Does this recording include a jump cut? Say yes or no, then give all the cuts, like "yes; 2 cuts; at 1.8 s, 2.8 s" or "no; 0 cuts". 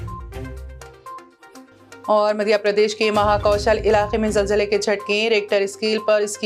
no; 0 cuts